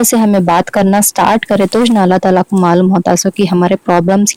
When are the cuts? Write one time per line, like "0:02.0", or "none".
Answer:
none